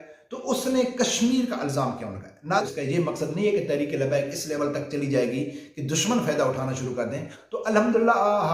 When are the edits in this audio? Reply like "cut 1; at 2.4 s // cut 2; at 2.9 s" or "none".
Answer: cut 1; at 2.6 s // cut 2; at 7.3 s